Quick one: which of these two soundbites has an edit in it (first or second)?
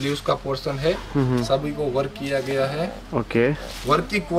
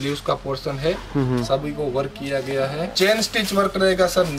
second